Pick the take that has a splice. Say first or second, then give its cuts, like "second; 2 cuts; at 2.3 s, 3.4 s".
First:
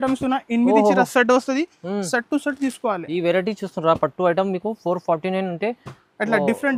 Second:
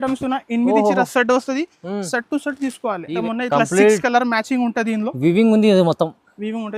second; 1 cut; at 3.2 s